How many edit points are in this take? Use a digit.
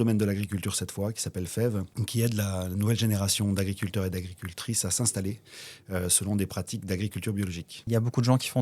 2